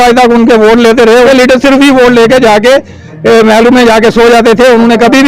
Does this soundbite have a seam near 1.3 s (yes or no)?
yes